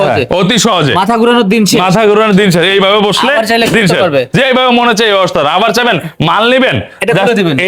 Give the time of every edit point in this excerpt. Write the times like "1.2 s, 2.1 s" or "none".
none